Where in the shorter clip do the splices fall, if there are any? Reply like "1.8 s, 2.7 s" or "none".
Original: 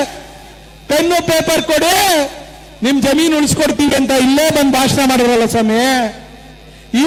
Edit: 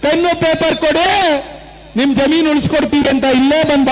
none